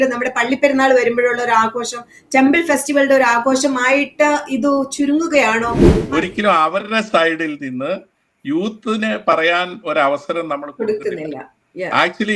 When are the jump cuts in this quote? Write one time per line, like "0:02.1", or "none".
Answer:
0:05.9